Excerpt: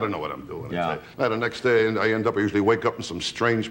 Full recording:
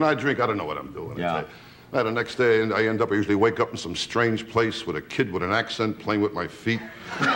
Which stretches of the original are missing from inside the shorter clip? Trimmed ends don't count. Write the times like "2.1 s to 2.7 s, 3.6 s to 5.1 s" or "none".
1.5 s to 1.8 s